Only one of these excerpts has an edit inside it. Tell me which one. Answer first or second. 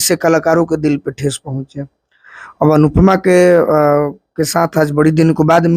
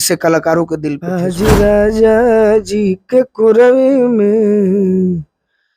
second